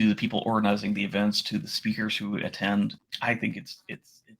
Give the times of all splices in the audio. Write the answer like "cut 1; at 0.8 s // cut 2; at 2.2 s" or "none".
cut 1; at 3.0 s